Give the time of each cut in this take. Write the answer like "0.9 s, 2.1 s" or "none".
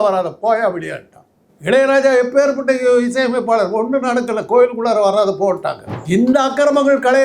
5.9 s